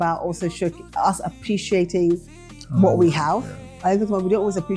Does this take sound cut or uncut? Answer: uncut